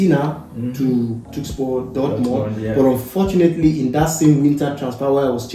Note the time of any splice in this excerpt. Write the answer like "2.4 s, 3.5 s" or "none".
1.3 s